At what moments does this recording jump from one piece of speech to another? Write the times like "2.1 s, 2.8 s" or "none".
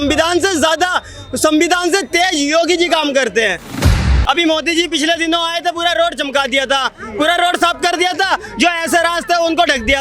3.9 s